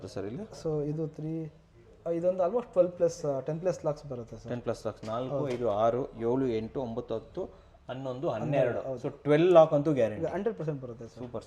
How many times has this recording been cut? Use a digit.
0